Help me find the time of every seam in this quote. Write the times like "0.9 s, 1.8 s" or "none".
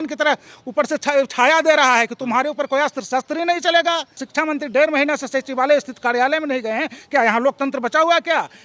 4.2 s